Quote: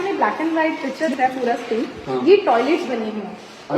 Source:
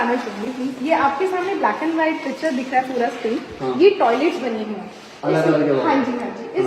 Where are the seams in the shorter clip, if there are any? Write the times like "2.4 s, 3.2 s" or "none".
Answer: 1.1 s

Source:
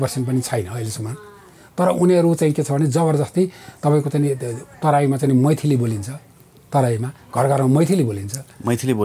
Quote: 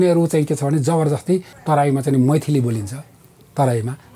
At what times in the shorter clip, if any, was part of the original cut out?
1.5 s

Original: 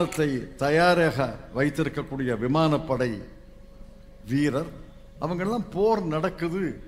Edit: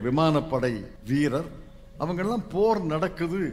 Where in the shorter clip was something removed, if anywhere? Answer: 0.9 s

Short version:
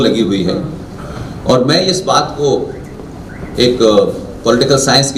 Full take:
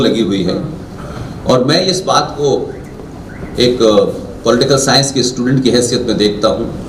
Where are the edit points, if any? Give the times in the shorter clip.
none

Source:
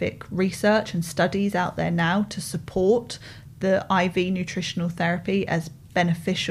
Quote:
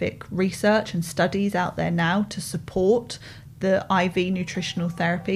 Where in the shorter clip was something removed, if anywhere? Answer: none

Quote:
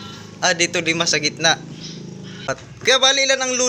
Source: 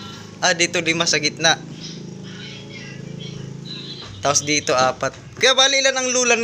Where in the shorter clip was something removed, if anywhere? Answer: 2.4 s

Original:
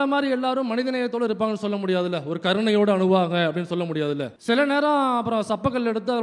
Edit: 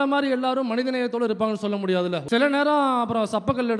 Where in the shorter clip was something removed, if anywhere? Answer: 2.2 s

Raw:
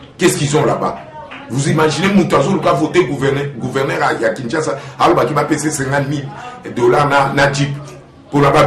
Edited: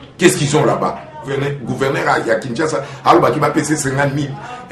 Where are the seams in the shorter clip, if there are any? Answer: 1.3 s

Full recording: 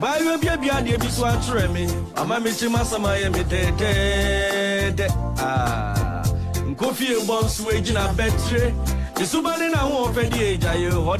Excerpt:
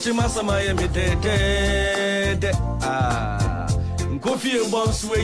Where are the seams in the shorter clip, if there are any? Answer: none

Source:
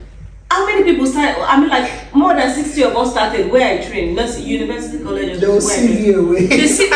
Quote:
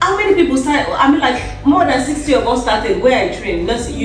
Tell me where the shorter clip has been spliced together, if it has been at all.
none

